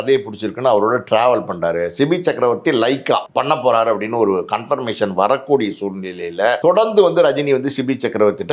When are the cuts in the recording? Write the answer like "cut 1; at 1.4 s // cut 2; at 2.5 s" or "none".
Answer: cut 1; at 3.3 s // cut 2; at 6.6 s